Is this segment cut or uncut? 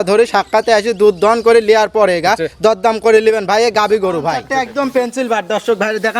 cut